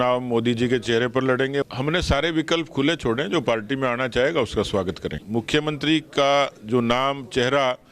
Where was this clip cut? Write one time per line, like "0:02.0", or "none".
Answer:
0:01.6
0:05.2